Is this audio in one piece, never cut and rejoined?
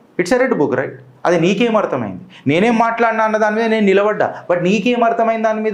yes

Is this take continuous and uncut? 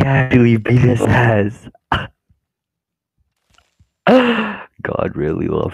yes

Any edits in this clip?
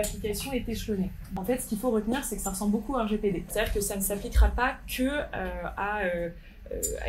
yes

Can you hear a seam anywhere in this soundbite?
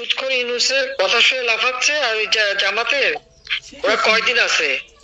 yes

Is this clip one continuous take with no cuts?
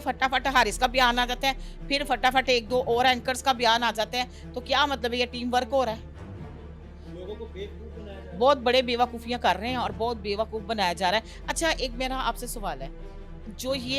yes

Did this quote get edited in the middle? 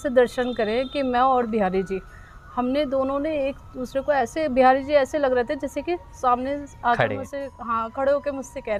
no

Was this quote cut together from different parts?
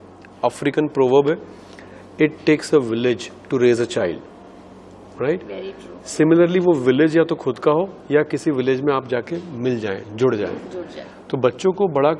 no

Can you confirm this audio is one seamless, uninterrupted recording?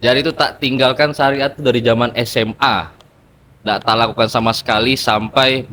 yes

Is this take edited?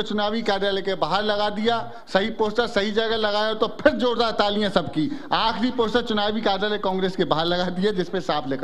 no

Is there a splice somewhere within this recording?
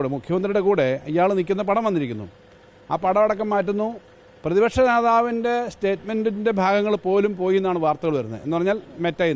no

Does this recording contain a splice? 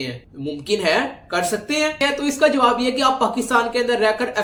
no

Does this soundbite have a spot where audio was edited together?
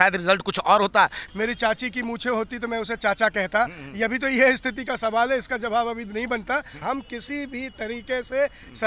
yes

